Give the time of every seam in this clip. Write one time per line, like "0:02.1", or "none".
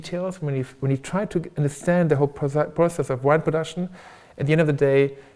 none